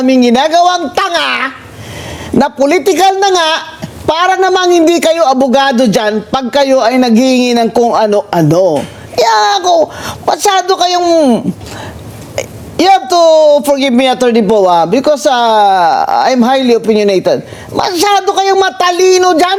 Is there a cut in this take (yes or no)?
no